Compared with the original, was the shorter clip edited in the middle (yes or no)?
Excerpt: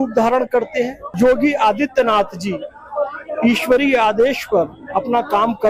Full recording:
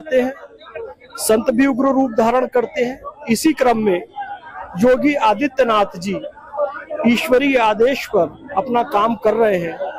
yes